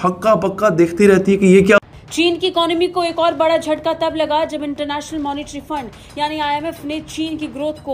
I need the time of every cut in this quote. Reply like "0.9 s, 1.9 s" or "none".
2.0 s